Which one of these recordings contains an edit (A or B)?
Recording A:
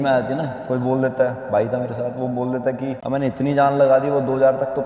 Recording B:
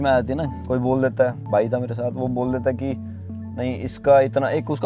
A